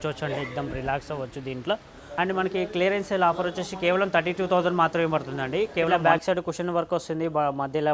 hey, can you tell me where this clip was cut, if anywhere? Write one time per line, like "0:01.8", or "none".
0:02.0
0:05.9